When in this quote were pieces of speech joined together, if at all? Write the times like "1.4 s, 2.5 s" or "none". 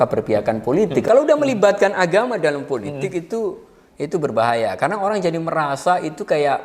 1.0 s